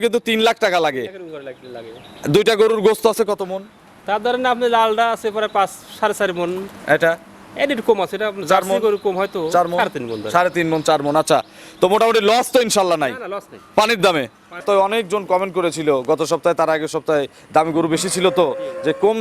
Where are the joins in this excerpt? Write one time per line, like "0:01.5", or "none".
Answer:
0:14.6